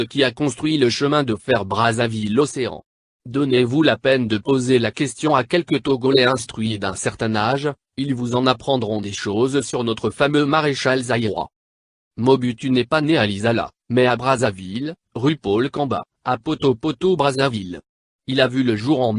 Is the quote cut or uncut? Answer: cut